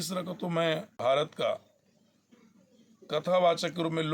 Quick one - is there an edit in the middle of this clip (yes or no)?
yes